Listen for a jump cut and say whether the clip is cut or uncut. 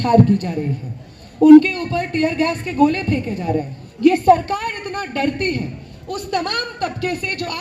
cut